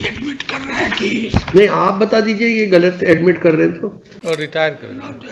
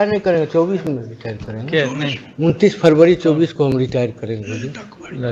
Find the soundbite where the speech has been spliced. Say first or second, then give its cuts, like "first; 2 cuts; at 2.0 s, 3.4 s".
first; 1 cut; at 4.1 s